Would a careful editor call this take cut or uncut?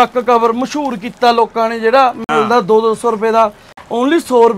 uncut